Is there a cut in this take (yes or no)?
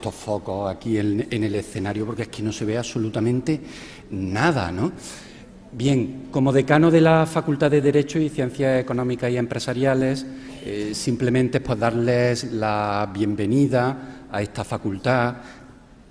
yes